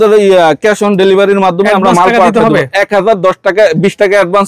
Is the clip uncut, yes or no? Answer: yes